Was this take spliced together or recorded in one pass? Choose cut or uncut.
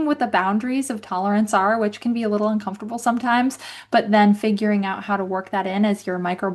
uncut